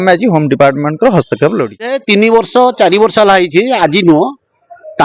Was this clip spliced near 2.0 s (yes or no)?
yes